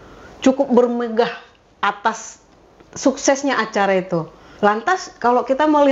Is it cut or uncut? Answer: cut